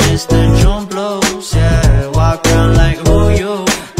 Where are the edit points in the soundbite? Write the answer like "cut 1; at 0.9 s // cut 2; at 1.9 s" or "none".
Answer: none

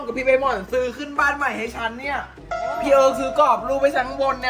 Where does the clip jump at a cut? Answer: none

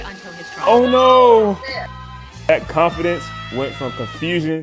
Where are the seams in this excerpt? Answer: none

